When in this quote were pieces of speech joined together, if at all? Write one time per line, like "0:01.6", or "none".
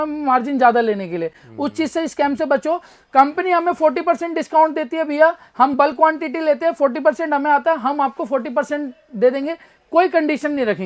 none